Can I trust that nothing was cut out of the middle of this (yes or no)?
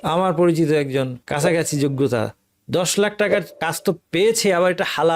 no